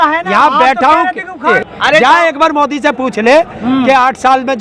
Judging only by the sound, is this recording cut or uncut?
cut